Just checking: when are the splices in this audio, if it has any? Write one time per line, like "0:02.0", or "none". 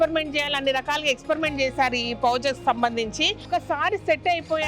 0:03.5